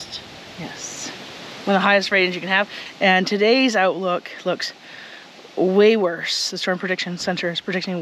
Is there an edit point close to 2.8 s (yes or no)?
yes